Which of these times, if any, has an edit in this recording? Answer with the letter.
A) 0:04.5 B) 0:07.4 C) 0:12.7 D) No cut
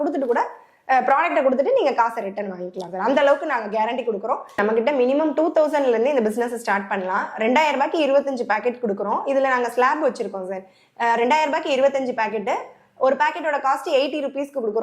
A